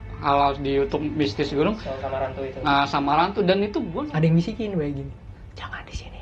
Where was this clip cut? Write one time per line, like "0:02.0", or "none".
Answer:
0:03.9